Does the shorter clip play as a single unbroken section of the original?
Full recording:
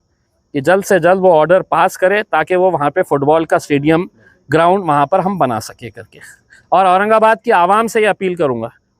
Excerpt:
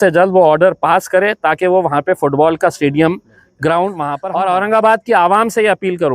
no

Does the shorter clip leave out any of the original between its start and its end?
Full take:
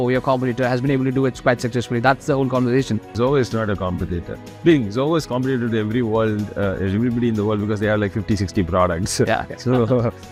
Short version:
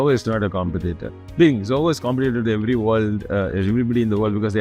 no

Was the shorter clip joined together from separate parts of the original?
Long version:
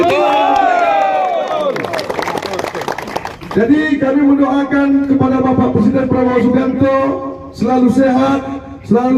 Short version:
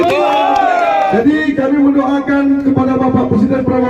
yes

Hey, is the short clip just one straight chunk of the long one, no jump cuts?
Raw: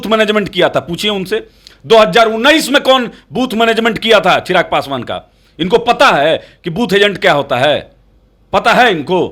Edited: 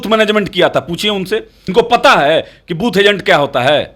no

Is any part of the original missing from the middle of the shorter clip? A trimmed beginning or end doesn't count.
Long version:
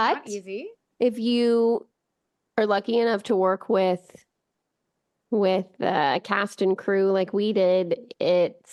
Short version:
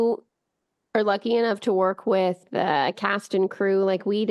yes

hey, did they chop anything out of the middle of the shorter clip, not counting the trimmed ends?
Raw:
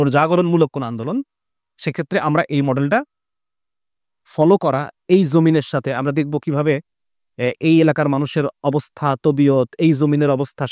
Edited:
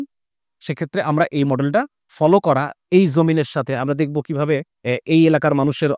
yes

